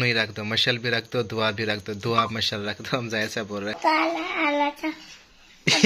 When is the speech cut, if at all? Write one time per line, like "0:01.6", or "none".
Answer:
0:03.8